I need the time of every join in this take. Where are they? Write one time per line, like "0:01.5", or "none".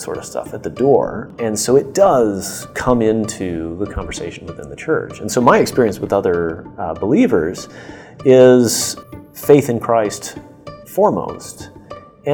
0:01.3
0:08.9